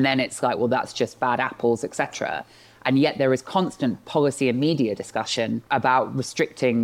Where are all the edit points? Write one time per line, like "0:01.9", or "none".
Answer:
0:05.6

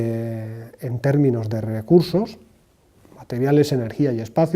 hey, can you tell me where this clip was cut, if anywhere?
0:00.9

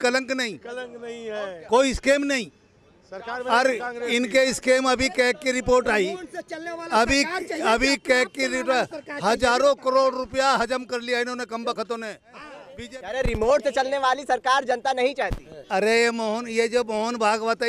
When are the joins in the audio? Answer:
0:12.6

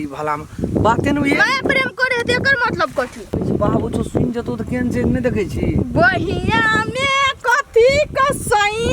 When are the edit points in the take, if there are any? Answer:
0:03.4

